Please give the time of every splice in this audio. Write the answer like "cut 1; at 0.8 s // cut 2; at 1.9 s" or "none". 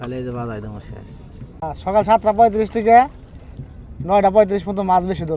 cut 1; at 1.5 s